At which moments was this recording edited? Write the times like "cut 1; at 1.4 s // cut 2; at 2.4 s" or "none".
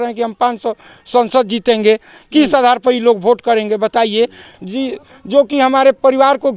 none